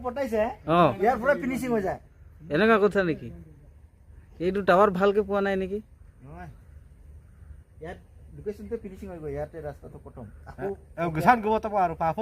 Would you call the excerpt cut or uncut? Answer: uncut